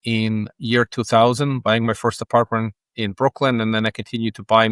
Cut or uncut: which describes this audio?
uncut